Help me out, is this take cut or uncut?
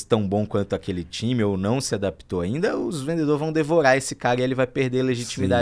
uncut